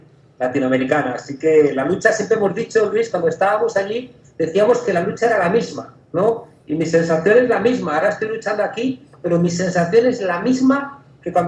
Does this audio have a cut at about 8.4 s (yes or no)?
no